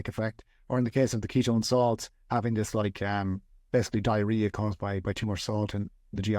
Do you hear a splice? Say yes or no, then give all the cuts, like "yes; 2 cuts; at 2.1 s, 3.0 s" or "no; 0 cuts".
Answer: no; 0 cuts